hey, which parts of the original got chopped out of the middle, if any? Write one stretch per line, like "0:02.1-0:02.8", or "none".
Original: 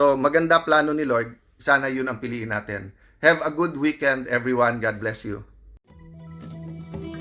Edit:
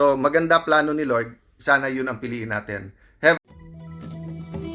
0:03.4-0:05.8